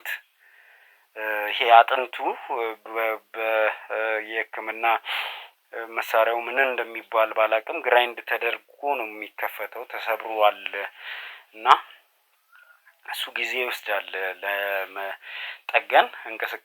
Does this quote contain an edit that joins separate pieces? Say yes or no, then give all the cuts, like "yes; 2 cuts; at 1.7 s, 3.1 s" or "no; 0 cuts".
no; 0 cuts